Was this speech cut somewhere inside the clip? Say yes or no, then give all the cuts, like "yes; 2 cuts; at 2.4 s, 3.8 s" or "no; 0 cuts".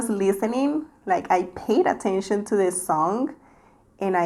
no; 0 cuts